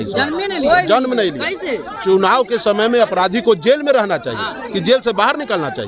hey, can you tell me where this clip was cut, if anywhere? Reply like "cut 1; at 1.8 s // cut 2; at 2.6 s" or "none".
cut 1; at 2.0 s